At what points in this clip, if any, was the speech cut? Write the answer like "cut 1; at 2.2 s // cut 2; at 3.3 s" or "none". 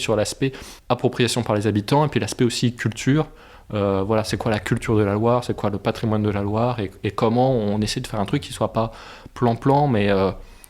none